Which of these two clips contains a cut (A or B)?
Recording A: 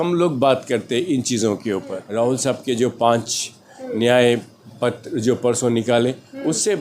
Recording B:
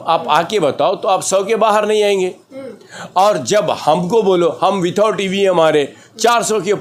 A